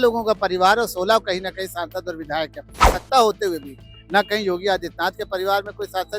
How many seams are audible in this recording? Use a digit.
1